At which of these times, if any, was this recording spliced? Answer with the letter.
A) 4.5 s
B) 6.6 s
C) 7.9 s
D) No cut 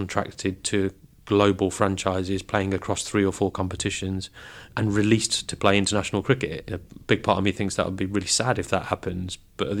B